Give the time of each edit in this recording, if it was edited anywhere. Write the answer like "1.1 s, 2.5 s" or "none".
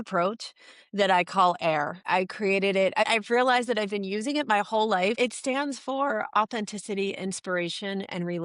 2.0 s, 3.1 s, 5.2 s

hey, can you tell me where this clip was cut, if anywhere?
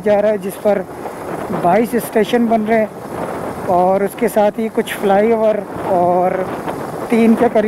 none

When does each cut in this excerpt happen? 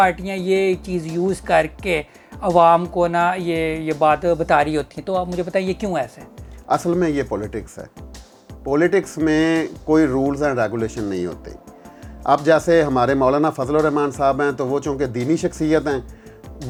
none

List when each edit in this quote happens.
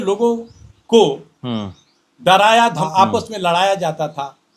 2.8 s

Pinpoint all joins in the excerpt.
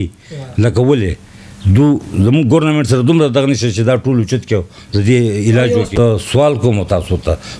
6.0 s

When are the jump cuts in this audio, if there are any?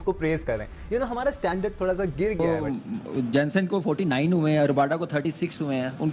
2.4 s

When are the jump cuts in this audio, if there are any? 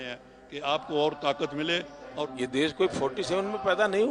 2.3 s

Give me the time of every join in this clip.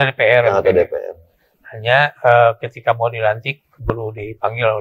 none

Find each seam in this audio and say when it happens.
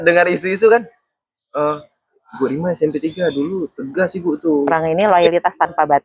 4.7 s

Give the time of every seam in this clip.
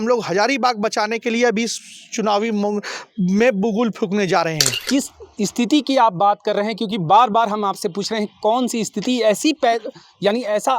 4.8 s

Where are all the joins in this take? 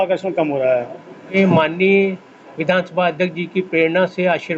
1.3 s

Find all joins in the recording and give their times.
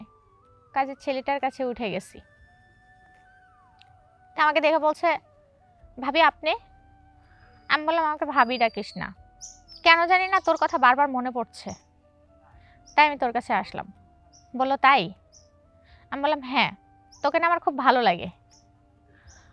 none

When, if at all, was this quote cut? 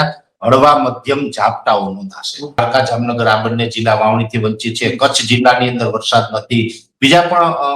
2.6 s

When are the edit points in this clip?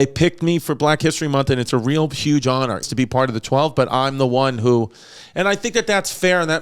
2.8 s

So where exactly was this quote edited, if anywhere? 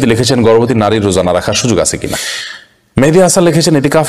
2.2 s

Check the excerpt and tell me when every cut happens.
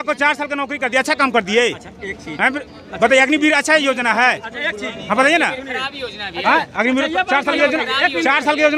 none

